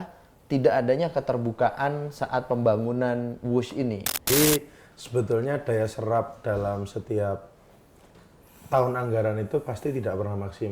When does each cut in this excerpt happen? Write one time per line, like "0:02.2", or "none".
0:04.1